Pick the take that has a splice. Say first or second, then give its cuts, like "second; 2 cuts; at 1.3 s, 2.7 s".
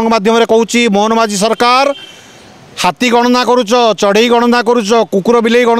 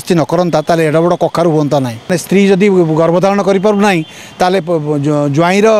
second; 1 cut; at 2.2 s